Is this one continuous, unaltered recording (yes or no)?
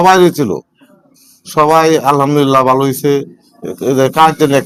yes